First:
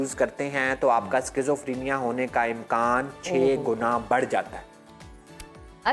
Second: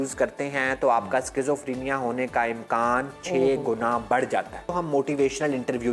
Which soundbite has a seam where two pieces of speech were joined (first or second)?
second